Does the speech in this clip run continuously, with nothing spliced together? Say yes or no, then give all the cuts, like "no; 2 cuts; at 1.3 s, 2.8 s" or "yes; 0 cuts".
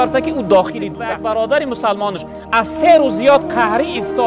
no; 1 cut; at 0.9 s